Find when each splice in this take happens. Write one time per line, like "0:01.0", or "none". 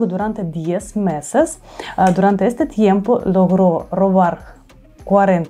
none